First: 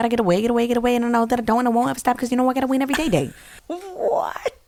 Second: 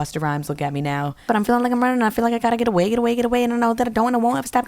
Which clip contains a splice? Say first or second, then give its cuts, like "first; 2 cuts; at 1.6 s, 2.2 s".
second; 1 cut; at 1.2 s